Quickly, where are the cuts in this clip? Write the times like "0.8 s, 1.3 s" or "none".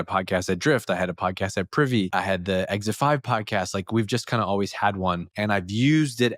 2.1 s, 5.3 s